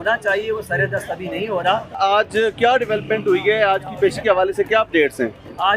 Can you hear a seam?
yes; 1 cut; at 1.9 s

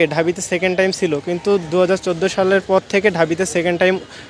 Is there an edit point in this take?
no; 0 cuts

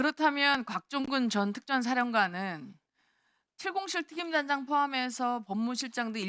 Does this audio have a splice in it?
yes; 1 cut; at 3.5 s

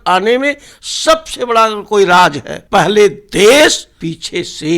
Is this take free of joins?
no; 2 cuts; at 2.5 s, 3.9 s

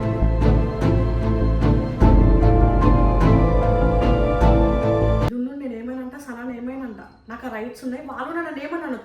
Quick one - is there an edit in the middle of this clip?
yes; 1 cut; at 5.3 s

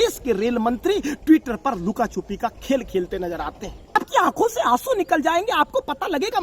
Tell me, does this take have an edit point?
yes; 1 cut; at 3.9 s

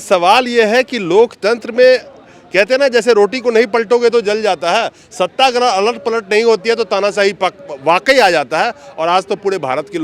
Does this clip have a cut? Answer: no; 0 cuts

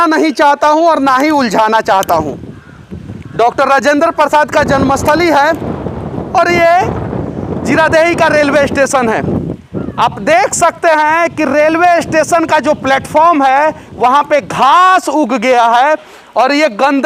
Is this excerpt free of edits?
yes; 0 cuts

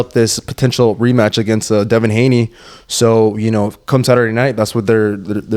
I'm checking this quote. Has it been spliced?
no; 0 cuts

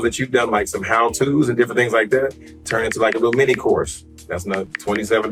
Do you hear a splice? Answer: no; 0 cuts

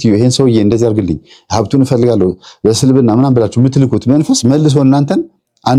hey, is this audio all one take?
yes; 0 cuts

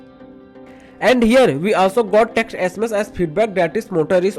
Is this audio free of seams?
no; 1 cut; at 1.0 s

